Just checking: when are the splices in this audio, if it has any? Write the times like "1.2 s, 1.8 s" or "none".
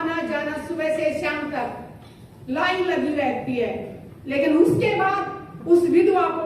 none